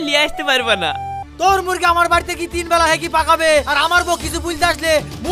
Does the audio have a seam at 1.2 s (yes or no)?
yes